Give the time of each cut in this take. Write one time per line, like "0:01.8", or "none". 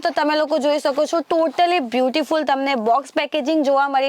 none

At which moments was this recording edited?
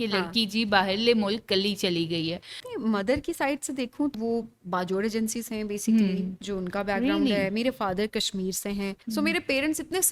0:02.6
0:04.1
0:09.0

